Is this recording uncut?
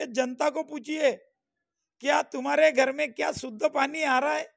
yes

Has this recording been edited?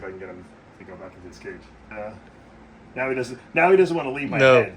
yes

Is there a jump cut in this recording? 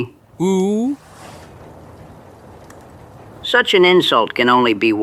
no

